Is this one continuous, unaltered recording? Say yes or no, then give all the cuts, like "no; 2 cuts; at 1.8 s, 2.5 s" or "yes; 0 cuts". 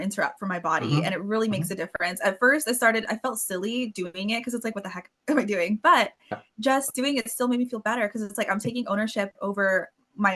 yes; 0 cuts